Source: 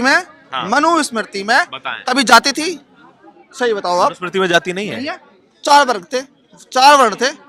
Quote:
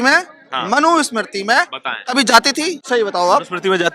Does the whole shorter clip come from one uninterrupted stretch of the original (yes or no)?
no